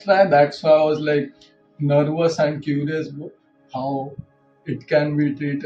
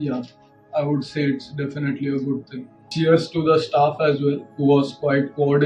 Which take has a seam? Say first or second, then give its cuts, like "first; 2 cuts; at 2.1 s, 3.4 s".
second; 1 cut; at 2.9 s